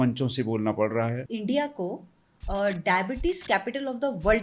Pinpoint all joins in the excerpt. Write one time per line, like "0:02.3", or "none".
0:01.2